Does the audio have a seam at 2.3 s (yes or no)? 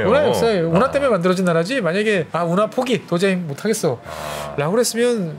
yes